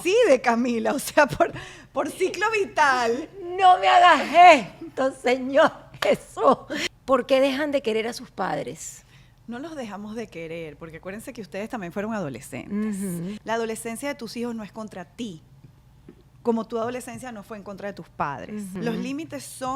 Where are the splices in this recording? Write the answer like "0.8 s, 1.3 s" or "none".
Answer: 6.7 s, 13.4 s, 18.8 s